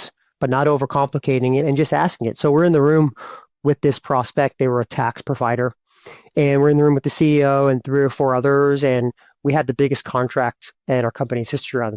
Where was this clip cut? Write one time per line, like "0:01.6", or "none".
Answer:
none